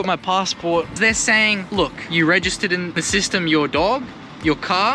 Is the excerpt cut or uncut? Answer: cut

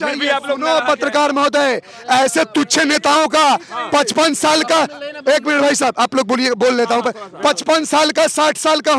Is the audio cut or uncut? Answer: uncut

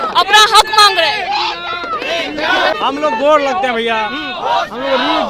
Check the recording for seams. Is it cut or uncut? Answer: cut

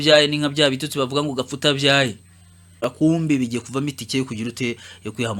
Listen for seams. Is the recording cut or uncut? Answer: cut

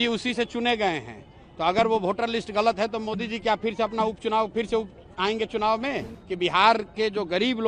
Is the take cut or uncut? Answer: cut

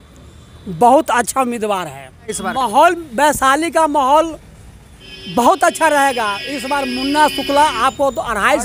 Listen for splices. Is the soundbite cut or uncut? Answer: cut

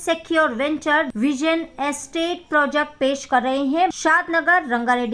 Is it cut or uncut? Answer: cut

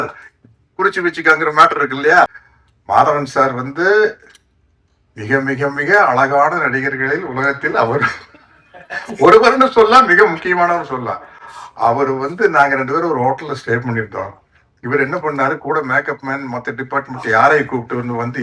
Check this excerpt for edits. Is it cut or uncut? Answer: cut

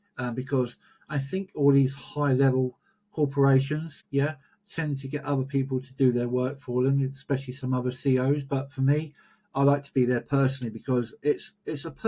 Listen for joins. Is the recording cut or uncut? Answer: cut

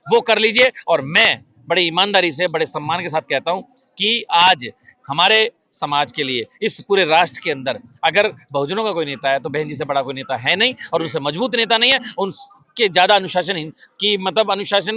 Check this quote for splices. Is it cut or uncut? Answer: uncut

